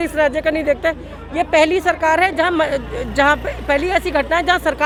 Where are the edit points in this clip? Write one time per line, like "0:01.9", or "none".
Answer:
none

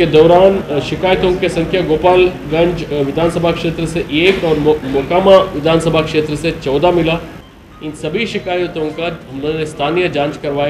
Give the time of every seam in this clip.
none

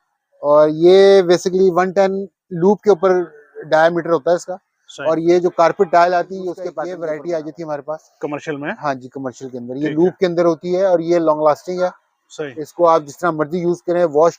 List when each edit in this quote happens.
0:06.7

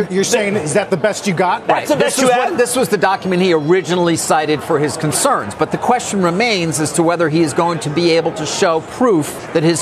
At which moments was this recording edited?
none

